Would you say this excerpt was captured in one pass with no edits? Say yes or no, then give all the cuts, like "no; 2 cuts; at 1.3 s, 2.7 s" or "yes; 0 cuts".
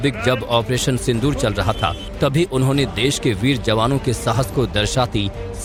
yes; 0 cuts